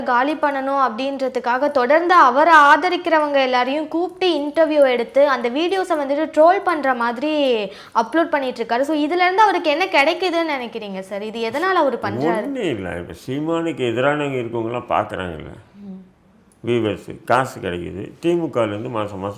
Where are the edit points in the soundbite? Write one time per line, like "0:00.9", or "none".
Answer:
none